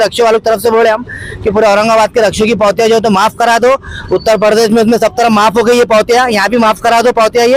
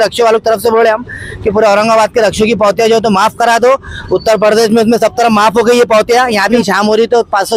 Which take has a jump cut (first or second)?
second